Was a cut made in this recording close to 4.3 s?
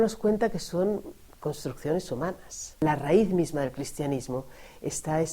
no; 1 cut; at 2.8 s

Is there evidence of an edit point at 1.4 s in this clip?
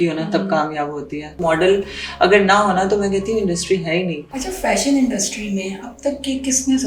yes; 2 cuts; at 1.4 s, 4.3 s

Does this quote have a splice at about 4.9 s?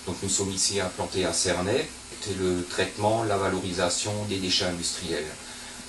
no; 1 cut; at 2.2 s

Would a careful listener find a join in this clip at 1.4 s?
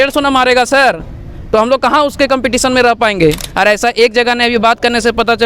no; 1 cut; at 3.5 s

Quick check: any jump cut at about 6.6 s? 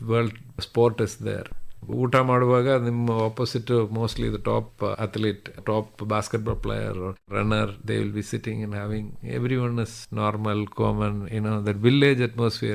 no; 3 cuts; at 1.9 s, 4.8 s, 10.0 s

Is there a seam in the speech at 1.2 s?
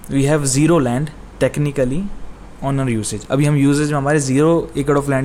no; 0 cuts

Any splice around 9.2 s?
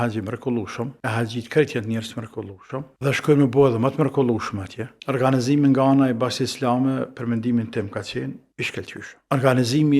yes; 3 cuts; at 1.0 s, 4.9 s, 9.2 s

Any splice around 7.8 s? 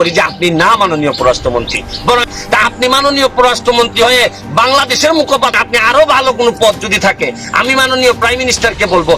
no; 2 cuts; at 2.3 s, 5.6 s

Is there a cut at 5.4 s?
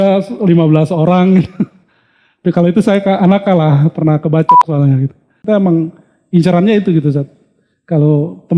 yes; 1 cut; at 5.4 s

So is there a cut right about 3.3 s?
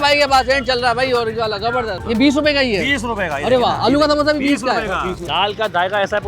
no; 2 cuts; at 2.0 s, 5.3 s

